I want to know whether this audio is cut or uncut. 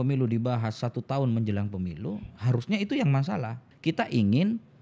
cut